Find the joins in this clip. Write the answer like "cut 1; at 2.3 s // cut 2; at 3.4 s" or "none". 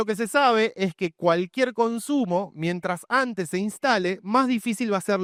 none